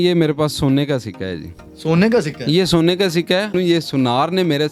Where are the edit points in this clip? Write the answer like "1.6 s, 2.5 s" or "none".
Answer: 3.5 s